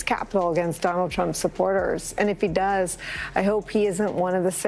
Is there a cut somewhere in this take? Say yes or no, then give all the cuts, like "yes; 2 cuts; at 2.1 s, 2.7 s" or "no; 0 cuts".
no; 0 cuts